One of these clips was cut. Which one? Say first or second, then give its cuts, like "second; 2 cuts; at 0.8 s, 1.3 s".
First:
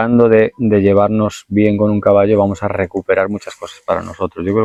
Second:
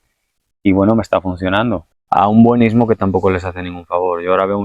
second; 1 cut; at 1.8 s